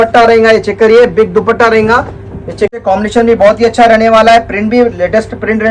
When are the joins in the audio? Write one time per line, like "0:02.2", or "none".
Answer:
0:02.8